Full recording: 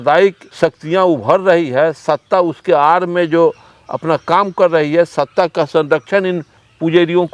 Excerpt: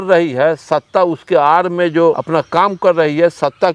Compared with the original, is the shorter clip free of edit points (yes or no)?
no